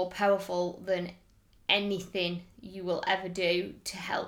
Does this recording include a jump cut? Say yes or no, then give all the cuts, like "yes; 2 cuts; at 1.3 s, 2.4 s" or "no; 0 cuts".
no; 0 cuts